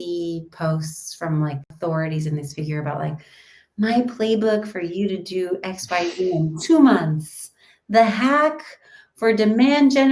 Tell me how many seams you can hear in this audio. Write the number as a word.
one